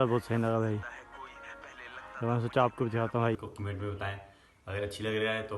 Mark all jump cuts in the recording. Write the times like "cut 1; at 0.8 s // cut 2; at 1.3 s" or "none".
cut 1; at 3.3 s